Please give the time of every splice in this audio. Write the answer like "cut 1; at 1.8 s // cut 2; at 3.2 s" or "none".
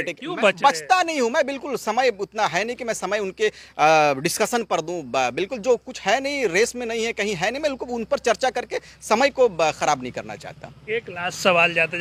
none

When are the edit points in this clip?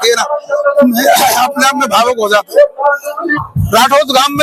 cut 1; at 3.4 s

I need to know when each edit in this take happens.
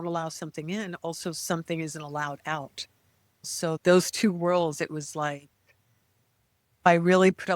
cut 1; at 3.5 s // cut 2; at 6.9 s

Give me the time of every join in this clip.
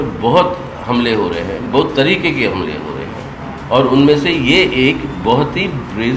none

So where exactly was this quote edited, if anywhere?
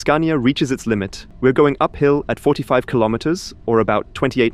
cut 1; at 1.2 s

